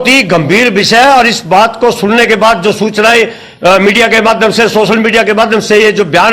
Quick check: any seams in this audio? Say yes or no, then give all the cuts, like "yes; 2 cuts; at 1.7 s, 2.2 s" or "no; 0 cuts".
no; 0 cuts